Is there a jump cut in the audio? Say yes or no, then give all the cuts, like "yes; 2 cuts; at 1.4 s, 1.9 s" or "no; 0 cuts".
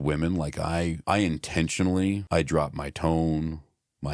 yes; 2 cuts; at 1.0 s, 2.2 s